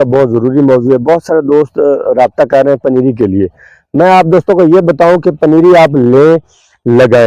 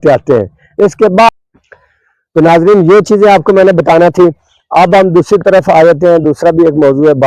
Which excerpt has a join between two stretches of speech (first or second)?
second